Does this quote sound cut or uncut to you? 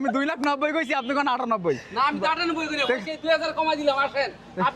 uncut